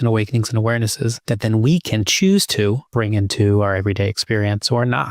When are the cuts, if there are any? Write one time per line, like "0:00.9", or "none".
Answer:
0:01.2
0:02.8